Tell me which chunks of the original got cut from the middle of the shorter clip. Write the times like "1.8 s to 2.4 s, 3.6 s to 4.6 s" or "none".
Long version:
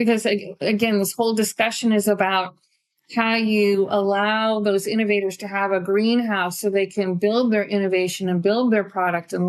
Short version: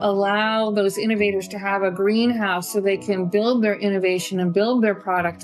none